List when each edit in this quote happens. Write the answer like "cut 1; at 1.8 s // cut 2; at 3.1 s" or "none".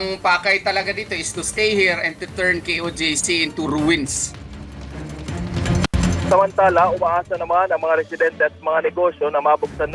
none